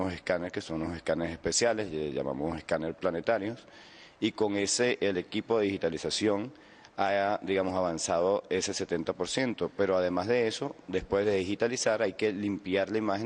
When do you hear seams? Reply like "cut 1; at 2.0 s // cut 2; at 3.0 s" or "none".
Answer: none